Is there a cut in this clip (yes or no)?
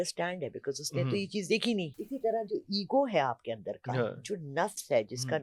yes